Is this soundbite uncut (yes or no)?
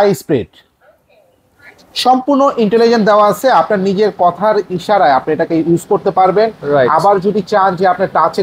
yes